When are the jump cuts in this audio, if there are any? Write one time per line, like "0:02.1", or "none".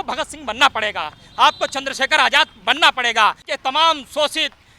0:03.5

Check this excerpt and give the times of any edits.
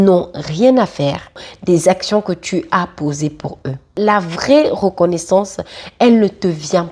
0:01.5
0:03.9

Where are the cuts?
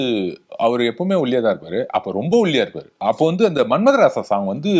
0:02.9

